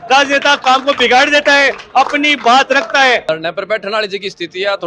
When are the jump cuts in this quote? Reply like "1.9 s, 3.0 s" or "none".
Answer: 3.2 s